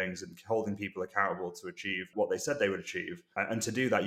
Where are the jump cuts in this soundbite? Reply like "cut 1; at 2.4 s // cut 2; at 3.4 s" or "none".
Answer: cut 1; at 2.1 s